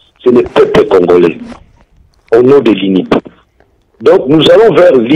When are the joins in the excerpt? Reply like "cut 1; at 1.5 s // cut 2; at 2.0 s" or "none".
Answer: none